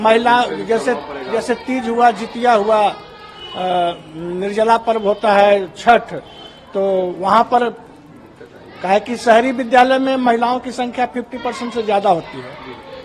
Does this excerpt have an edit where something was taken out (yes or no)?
no